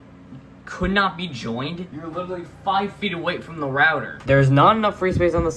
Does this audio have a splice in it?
yes; 2 cuts; at 1.9 s, 4.1 s

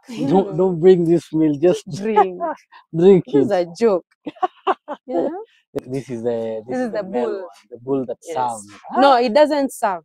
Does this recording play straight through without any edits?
no; 1 cut; at 5.8 s

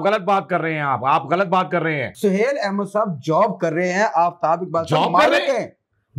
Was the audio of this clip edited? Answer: yes; 1 cut; at 2.2 s

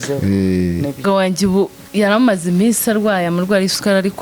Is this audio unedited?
no; 1 cut; at 1.0 s

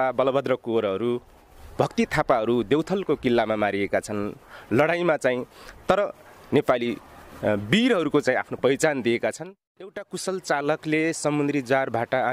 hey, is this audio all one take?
no; 1 cut; at 9.9 s

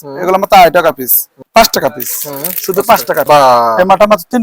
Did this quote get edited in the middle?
yes; 2 cuts; at 1.3 s, 3.2 s

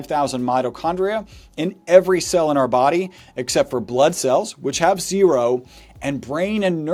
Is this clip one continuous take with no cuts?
yes; 0 cuts

